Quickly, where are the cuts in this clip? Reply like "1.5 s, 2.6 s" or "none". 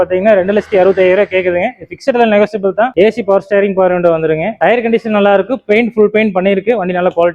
2.9 s, 4.5 s